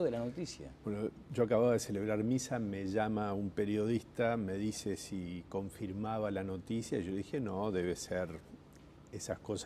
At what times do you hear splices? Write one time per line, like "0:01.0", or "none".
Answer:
0:07.8